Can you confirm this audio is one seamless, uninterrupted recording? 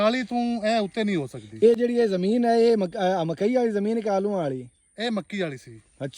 yes; 0 cuts

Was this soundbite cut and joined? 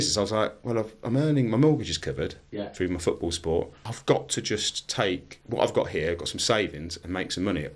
yes; 2 cuts; at 3.8 s, 5.3 s

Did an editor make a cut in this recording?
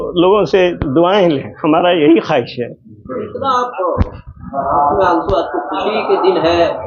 no; 0 cuts

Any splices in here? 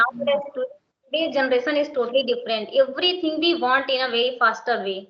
no; 0 cuts

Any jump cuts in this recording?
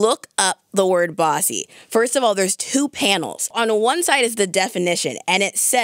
yes; 1 cut; at 3.5 s

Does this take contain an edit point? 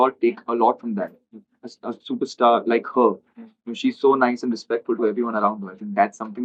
no; 0 cuts

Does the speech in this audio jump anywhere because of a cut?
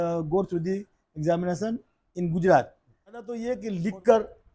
yes; 1 cut; at 3.3 s

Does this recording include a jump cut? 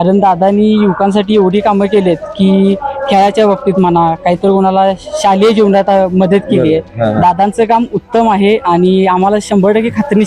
no; 0 cuts

